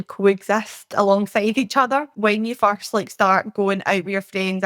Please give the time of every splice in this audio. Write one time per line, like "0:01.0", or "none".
0:02.1